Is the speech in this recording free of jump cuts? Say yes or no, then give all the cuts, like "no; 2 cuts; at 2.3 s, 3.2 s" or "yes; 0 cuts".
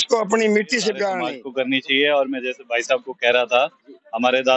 no; 1 cut; at 1.4 s